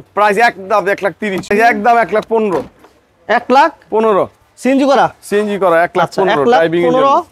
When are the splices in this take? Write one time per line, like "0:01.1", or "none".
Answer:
0:01.5